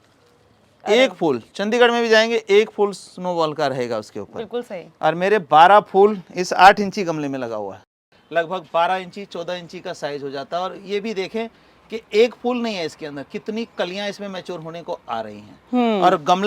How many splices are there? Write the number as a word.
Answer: one